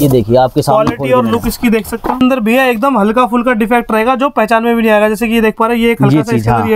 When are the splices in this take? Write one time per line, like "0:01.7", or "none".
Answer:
0:02.2